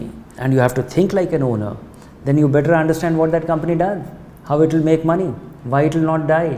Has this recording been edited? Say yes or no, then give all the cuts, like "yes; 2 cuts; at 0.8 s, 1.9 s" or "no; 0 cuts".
no; 0 cuts